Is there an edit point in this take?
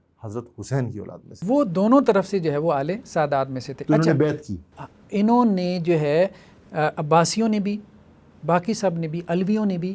yes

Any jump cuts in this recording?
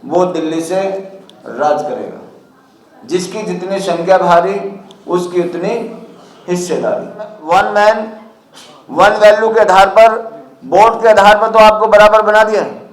yes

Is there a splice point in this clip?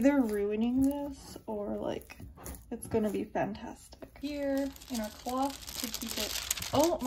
yes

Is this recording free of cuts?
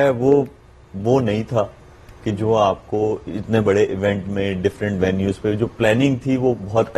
yes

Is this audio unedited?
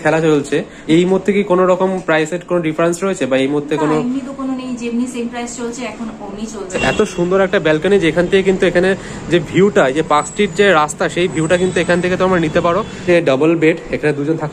no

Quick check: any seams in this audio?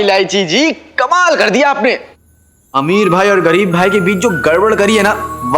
no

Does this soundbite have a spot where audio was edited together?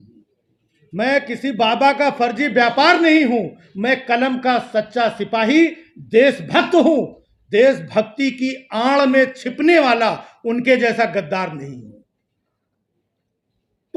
no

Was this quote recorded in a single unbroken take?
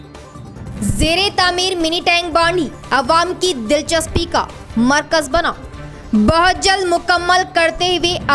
yes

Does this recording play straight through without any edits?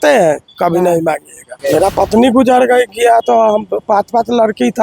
no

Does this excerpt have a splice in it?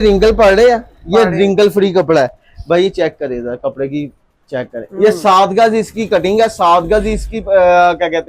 no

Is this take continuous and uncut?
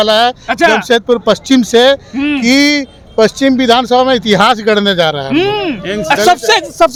yes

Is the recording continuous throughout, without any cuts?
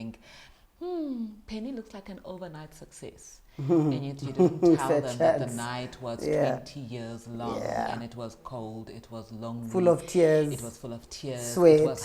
yes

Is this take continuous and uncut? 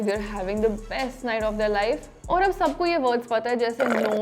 no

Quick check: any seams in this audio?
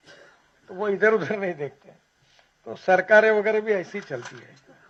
no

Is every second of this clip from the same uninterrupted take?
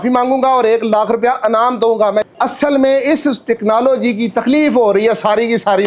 no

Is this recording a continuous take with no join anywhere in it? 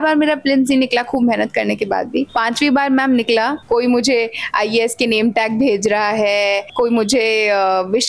no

